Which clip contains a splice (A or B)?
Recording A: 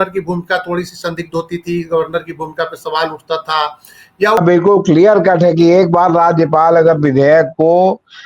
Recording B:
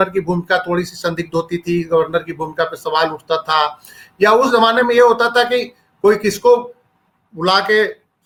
A